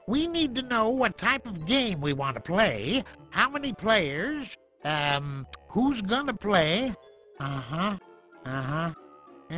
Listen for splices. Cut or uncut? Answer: uncut